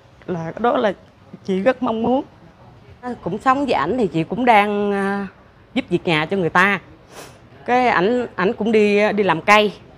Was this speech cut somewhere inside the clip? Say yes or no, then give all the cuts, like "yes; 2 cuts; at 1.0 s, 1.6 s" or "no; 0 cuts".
yes; 1 cut; at 3.2 s